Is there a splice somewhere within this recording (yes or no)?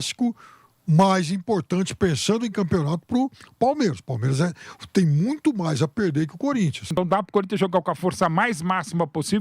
yes